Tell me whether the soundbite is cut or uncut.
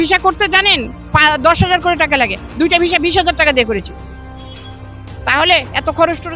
uncut